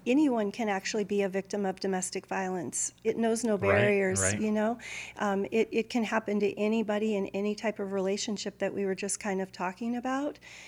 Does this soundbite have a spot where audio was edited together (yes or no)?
yes